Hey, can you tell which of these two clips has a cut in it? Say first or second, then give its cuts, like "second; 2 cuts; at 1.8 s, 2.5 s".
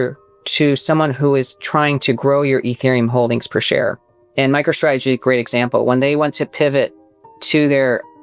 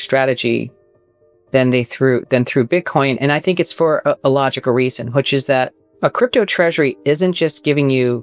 second; 1 cut; at 5.8 s